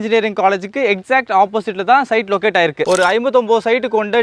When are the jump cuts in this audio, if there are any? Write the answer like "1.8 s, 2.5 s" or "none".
2.9 s